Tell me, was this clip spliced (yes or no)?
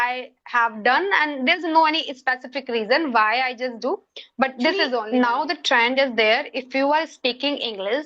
yes